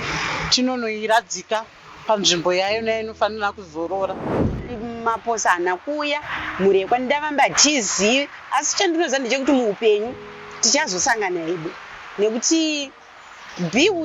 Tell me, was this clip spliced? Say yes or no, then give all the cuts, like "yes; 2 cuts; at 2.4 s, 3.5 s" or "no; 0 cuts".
yes; 1 cut; at 4.5 s